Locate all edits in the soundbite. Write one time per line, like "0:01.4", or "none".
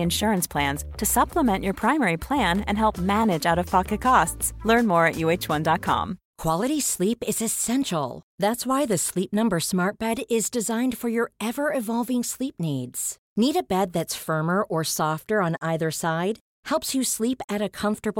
0:06.2